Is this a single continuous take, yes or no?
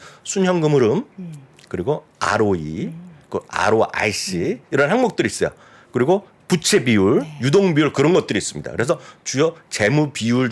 yes